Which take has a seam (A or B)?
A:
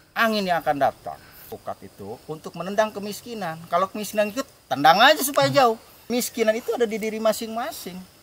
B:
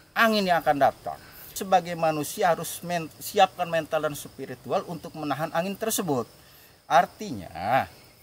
A